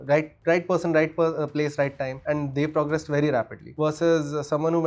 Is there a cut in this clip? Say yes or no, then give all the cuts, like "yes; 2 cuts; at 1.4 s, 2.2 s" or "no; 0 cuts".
yes; 2 cuts; at 2.1 s, 3.6 s